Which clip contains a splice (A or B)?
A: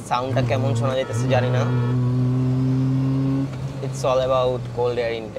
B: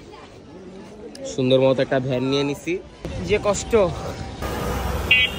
B